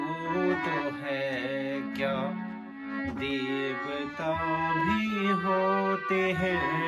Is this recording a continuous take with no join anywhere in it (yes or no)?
yes